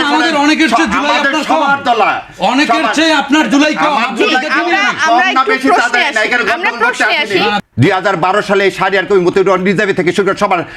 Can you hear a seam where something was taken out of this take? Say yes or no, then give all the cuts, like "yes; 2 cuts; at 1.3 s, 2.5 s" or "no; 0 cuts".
yes; 1 cut; at 7.6 s